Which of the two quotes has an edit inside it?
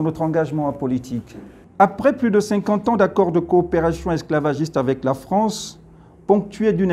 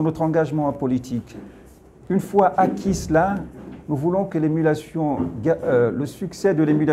first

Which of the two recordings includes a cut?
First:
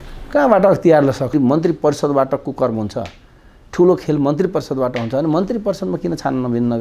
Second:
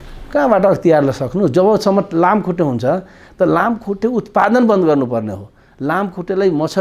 first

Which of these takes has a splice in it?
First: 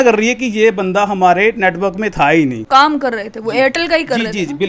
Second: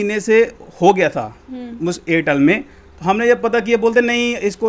first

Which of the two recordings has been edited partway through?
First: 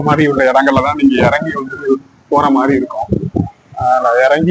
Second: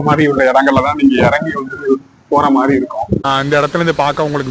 second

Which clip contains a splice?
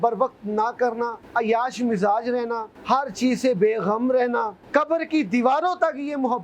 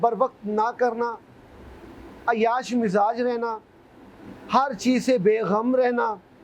first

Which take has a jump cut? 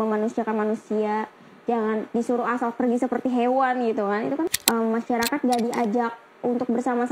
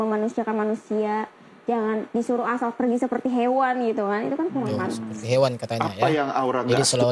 first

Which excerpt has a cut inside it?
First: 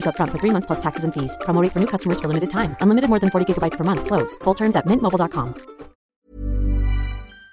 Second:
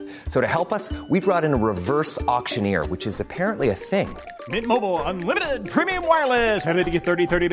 first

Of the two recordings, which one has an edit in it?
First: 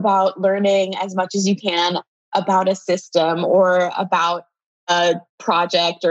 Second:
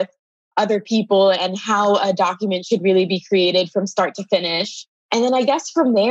second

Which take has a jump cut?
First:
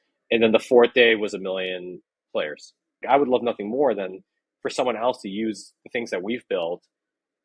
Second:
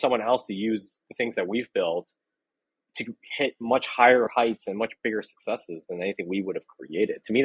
first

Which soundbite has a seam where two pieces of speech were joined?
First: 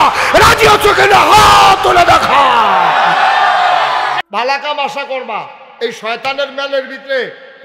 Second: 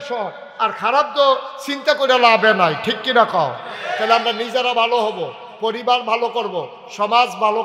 first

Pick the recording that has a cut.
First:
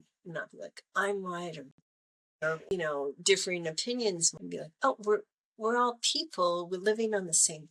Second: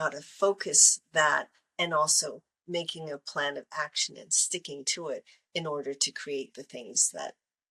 first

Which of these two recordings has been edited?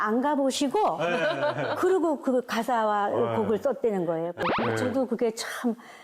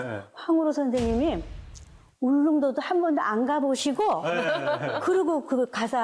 first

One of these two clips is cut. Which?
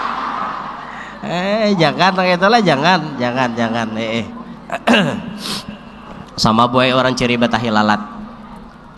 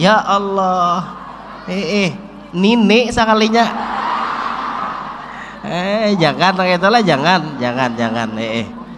first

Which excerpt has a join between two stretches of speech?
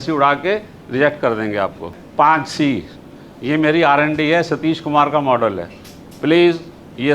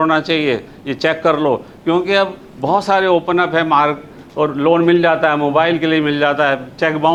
first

